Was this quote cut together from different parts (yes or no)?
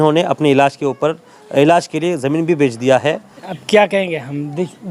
yes